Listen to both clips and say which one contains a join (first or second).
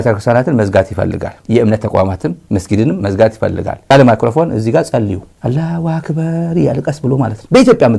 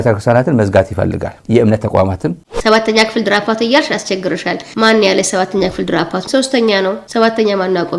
second